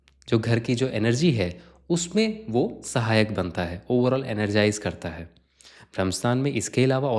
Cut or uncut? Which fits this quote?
uncut